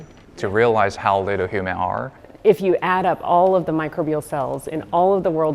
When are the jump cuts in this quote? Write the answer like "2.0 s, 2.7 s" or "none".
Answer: 1.0 s, 2.2 s